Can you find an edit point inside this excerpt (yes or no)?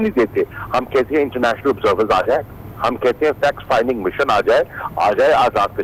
no